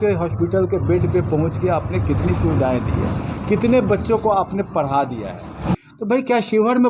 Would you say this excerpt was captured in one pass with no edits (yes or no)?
no